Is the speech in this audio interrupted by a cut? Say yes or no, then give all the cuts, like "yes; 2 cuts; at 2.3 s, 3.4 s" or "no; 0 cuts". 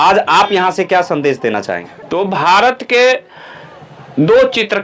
yes; 1 cut; at 1.9 s